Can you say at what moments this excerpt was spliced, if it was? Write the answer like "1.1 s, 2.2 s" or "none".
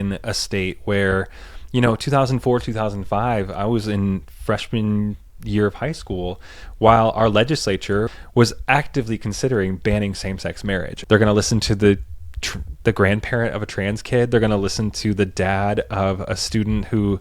8.1 s, 10.9 s